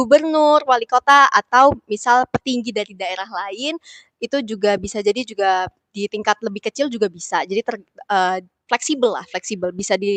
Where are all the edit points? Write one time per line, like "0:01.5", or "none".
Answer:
none